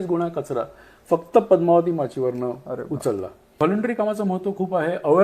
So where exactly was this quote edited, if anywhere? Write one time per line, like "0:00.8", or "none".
0:03.6